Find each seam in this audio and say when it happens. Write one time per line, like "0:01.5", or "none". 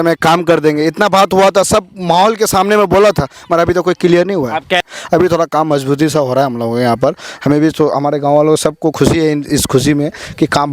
0:04.8